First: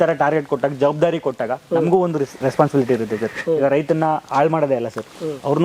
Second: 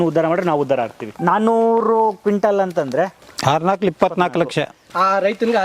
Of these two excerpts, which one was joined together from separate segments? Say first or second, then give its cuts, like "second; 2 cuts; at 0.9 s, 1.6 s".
second; 3 cuts; at 1.1 s, 3.2 s, 4.8 s